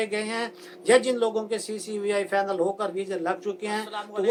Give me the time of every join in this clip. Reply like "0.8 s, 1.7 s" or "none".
none